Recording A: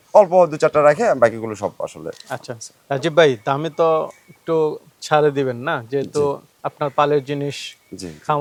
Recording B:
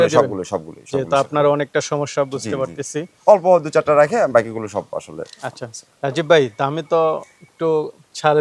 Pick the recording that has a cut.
B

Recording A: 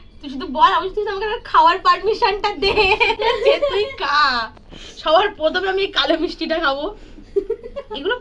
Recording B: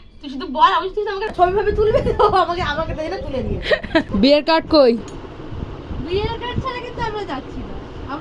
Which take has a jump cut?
B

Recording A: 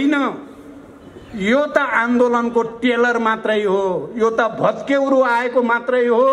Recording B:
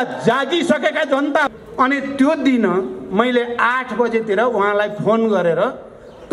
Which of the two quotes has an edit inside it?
B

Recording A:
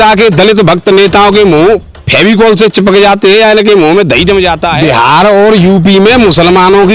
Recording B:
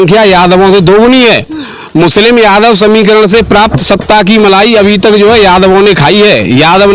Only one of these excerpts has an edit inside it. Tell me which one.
A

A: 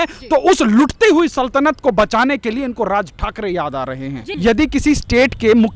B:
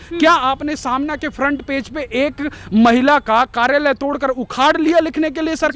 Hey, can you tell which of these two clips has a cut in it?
A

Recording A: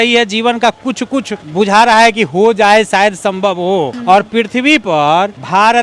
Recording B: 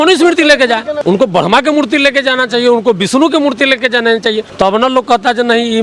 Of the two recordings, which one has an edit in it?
B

